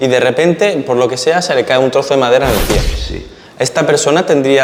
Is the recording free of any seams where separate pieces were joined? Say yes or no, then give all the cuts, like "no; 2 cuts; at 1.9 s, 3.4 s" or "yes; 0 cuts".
yes; 0 cuts